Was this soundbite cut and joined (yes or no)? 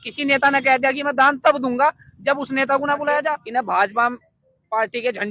yes